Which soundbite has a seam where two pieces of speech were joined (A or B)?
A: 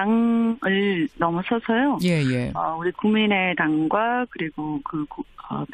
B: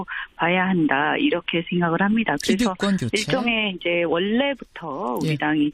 B